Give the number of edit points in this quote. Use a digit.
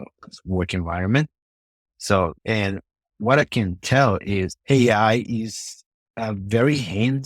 2